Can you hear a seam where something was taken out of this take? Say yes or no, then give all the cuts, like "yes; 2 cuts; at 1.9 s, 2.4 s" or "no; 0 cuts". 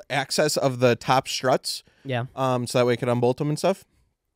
no; 0 cuts